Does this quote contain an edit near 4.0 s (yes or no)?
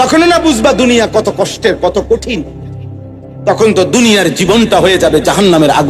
no